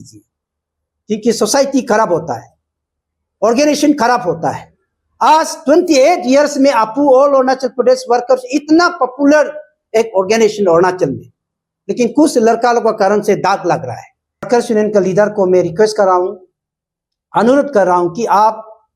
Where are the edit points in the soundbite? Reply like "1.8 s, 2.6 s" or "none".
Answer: 14.5 s

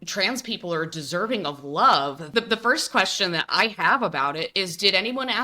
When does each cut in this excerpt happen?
2.3 s

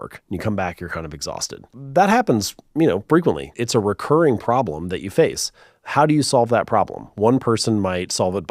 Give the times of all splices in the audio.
1.8 s, 3.6 s

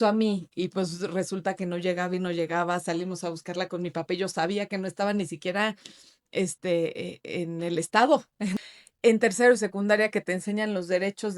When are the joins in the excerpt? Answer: 8.6 s

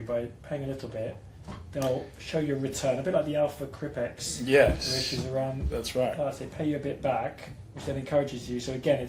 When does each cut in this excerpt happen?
none

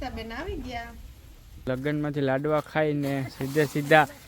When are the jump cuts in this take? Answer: 1.6 s

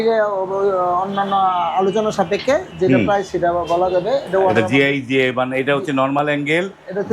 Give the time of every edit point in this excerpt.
none

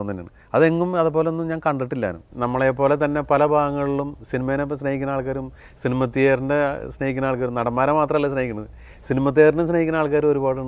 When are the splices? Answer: 2.3 s

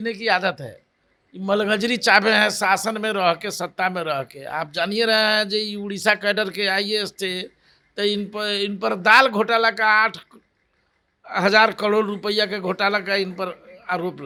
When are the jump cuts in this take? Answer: none

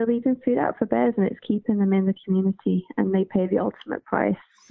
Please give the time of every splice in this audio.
none

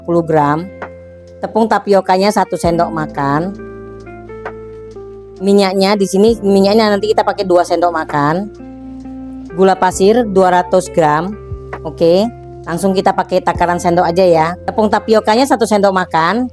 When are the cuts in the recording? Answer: none

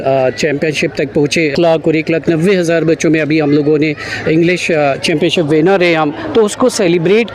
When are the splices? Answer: 1.5 s

